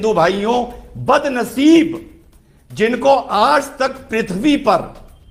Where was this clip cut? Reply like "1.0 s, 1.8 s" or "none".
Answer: none

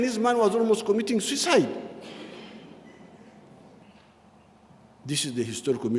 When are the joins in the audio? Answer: 3.8 s

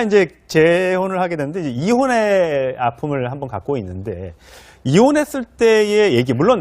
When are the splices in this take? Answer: 3.3 s

